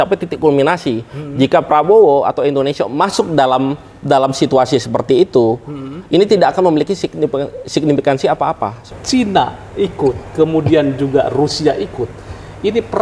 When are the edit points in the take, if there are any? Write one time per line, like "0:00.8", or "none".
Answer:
0:08.9